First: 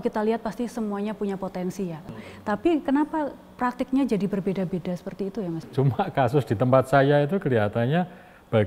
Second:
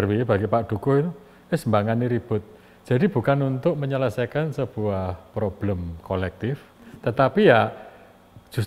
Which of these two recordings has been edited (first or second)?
first